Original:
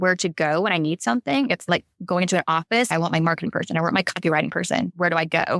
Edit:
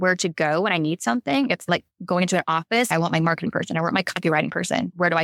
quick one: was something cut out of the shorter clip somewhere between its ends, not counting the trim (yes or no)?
no